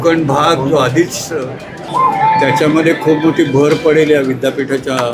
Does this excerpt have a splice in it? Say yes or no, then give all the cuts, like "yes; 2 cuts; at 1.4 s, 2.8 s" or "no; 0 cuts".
yes; 1 cut; at 1.8 s